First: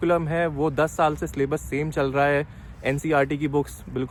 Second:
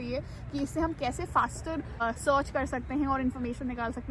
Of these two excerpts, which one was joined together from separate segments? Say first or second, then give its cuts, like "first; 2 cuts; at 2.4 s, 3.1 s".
second; 1 cut; at 2.0 s